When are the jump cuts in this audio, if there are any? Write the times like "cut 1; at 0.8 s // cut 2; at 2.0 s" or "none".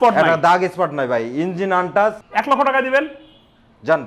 cut 1; at 2.2 s